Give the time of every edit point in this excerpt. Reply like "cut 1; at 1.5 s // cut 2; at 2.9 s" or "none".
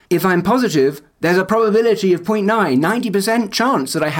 cut 1; at 1.1 s